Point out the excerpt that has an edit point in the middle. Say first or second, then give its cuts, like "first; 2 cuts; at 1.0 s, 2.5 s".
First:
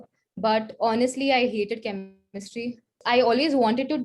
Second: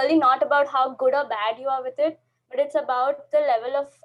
first; 1 cut; at 3.0 s